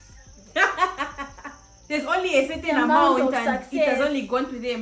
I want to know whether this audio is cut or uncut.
cut